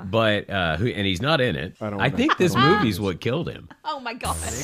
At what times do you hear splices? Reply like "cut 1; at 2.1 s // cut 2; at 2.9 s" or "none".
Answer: cut 1; at 1.8 s